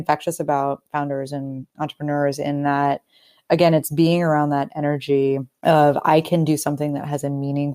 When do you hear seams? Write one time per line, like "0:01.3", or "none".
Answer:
0:05.5